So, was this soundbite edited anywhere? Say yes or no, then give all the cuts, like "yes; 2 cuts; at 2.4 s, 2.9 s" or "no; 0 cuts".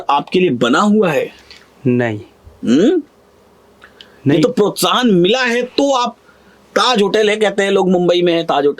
no; 0 cuts